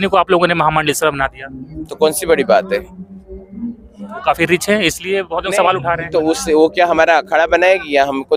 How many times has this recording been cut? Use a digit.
0